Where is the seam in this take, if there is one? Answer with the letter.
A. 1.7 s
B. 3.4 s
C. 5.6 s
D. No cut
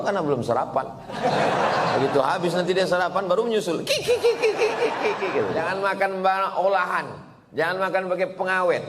C